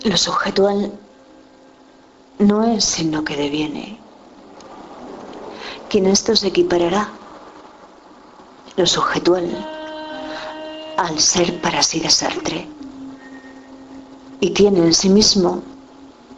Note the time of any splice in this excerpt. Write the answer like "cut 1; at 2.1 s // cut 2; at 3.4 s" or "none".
cut 1; at 6.2 s